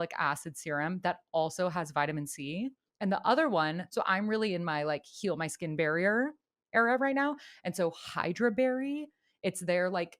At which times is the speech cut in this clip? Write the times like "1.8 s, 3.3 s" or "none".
2.9 s, 3.8 s